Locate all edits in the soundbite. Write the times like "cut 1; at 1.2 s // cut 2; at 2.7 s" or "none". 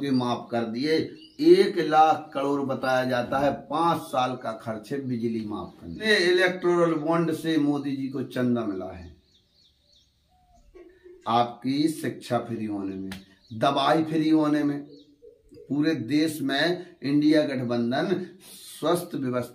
cut 1; at 6.1 s

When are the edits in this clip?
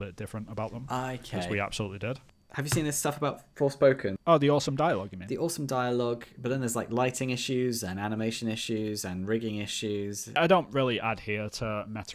cut 1; at 2.4 s // cut 2; at 4.2 s // cut 3; at 10.4 s

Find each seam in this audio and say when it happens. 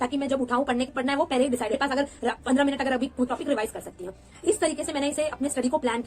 cut 1; at 0.9 s // cut 2; at 1.7 s // cut 3; at 3.3 s

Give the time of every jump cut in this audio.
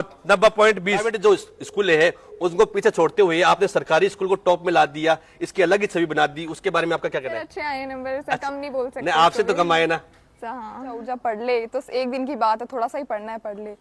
cut 1; at 1.1 s // cut 2; at 7.5 s // cut 3; at 11.0 s

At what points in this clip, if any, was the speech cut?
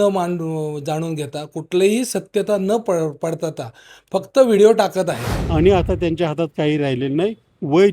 cut 1; at 5.3 s

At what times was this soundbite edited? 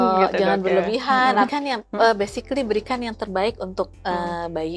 cut 1; at 1.5 s

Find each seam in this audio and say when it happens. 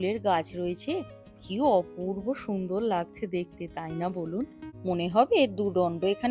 cut 1; at 4.7 s

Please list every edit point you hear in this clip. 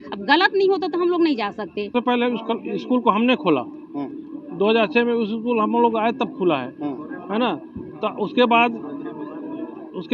cut 1; at 1.9 s

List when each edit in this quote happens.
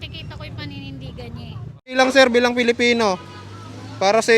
cut 1; at 1.9 s

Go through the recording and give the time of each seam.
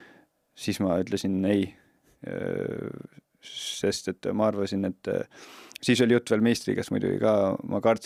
none

